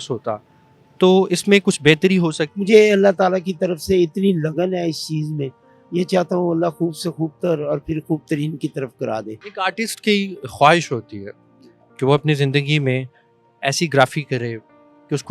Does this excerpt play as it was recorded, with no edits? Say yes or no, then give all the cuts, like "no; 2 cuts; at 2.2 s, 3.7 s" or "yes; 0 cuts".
no; 2 cuts; at 2.5 s, 9.4 s